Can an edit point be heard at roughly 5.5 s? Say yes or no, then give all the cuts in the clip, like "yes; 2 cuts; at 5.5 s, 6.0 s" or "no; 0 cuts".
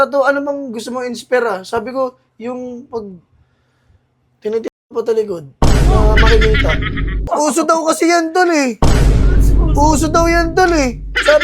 no; 1 cut; at 7.3 s